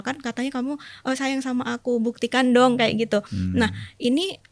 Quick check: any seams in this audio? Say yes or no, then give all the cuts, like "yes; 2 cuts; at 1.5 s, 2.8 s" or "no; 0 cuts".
no; 0 cuts